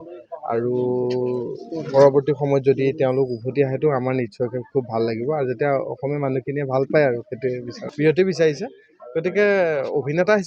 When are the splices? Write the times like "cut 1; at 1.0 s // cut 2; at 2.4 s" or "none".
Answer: cut 1; at 7.8 s

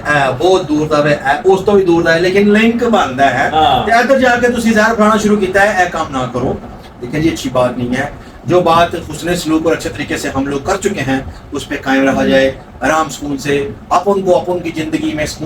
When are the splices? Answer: none

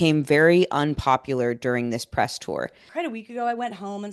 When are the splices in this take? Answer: cut 1; at 2.9 s

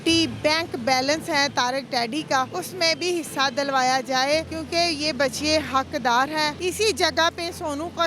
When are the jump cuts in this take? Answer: cut 1; at 2.6 s // cut 2; at 4.6 s // cut 3; at 6.6 s

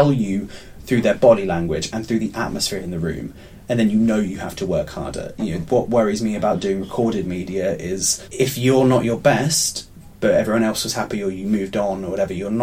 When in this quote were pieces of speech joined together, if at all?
cut 1; at 8.2 s

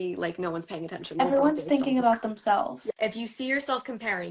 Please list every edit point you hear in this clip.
cut 1; at 1.2 s // cut 2; at 2.8 s

